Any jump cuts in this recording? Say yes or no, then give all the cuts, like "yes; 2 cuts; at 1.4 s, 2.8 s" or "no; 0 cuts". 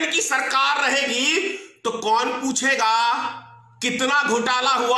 no; 0 cuts